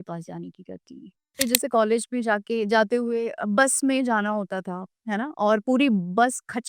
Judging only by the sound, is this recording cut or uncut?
cut